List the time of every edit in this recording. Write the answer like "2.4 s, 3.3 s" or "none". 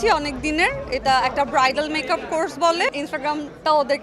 2.9 s

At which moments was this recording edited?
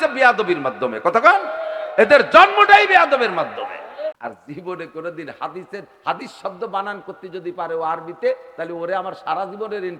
4.2 s

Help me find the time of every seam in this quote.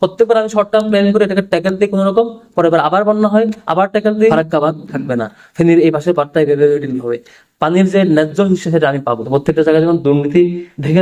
4.3 s, 9.3 s

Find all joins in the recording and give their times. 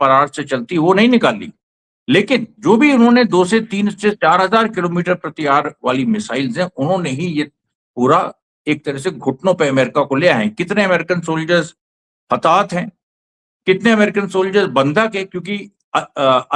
none

